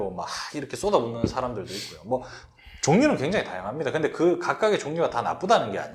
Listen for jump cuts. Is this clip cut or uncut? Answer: uncut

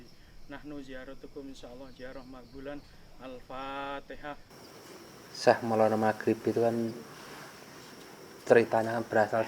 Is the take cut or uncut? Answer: cut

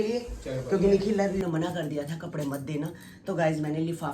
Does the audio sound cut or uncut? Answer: cut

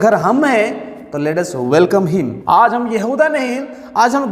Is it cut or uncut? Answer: cut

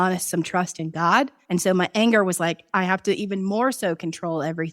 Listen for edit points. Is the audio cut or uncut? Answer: cut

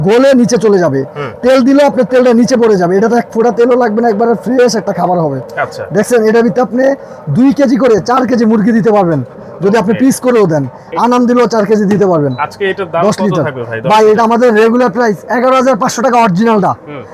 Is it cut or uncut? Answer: uncut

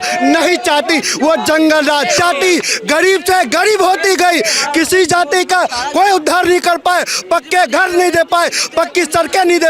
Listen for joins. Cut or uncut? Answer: cut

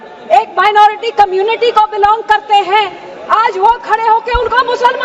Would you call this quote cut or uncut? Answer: uncut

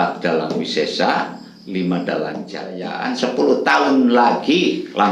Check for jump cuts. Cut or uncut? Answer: cut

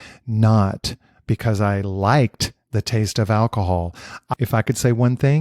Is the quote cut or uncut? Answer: cut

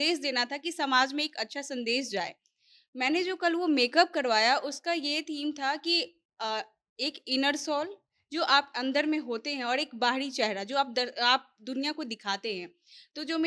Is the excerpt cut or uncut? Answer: uncut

